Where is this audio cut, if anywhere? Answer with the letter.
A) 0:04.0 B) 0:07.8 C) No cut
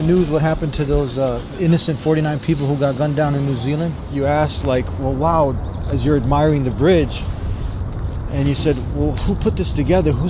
A